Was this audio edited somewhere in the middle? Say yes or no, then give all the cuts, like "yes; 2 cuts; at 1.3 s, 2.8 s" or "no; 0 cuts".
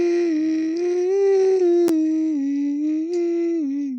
no; 0 cuts